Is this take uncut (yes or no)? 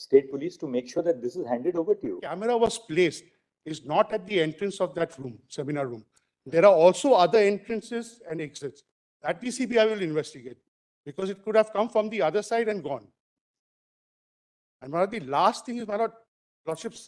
yes